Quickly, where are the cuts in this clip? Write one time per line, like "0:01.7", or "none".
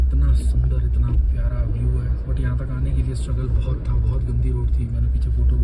none